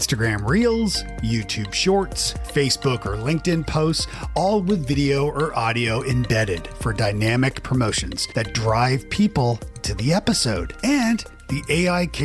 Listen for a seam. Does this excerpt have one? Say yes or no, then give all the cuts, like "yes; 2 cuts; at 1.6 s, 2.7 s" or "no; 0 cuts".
no; 0 cuts